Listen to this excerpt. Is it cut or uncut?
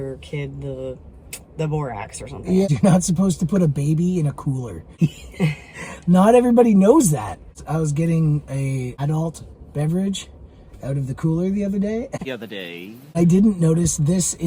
cut